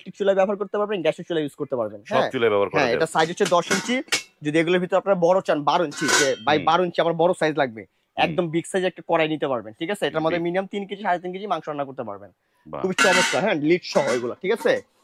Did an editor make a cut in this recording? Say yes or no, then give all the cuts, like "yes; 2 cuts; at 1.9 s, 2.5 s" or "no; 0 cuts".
no; 0 cuts